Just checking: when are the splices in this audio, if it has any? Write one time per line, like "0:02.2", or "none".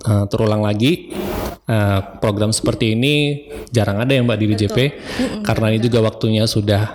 none